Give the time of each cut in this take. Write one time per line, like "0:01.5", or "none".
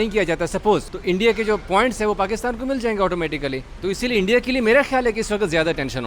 0:00.9
0:03.7